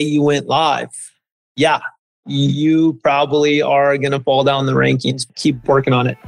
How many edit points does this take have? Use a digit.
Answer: 1